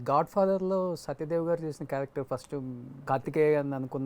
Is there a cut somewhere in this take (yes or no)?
yes